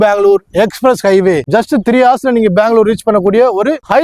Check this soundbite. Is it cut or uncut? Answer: uncut